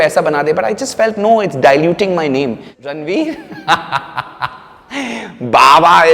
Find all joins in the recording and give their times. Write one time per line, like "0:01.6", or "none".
0:02.7